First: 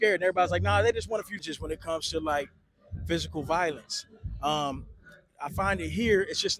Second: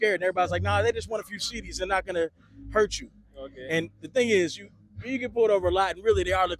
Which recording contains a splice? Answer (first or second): first